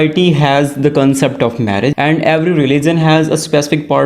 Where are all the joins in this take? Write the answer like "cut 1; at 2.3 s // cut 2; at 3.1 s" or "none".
cut 1; at 1.9 s